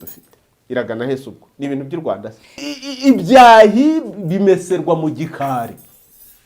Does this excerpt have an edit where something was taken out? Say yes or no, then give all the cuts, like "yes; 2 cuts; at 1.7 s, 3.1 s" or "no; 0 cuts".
yes; 1 cut; at 2.6 s